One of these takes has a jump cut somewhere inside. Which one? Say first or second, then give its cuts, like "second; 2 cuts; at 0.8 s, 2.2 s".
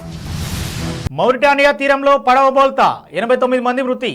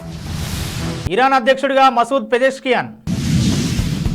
first; 1 cut; at 1.0 s